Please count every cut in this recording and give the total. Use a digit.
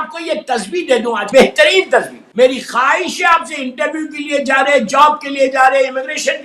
2